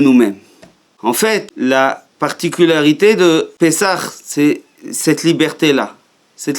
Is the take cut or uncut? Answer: cut